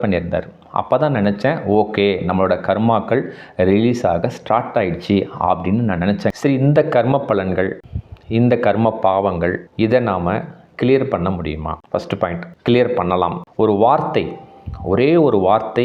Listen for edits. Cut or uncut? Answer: cut